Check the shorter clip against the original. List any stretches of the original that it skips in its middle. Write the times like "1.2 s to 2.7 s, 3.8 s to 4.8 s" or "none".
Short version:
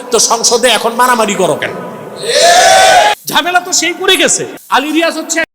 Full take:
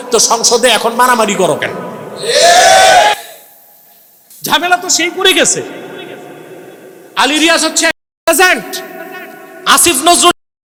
3.2 s to 4.4 s, 5.7 s to 7.0 s